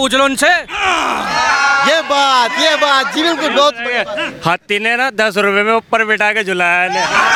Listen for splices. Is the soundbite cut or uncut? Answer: uncut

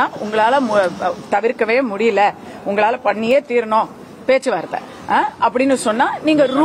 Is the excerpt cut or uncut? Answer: uncut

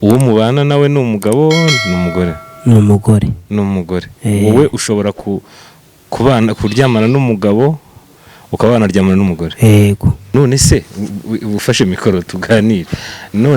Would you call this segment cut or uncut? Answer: cut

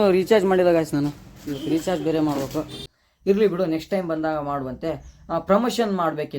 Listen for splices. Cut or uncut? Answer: cut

